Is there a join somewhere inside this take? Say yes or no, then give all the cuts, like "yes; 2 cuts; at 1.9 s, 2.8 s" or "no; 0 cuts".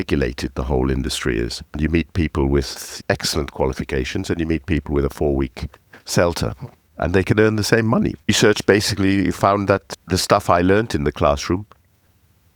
yes; 3 cuts; at 1.8 s, 8.3 s, 10.0 s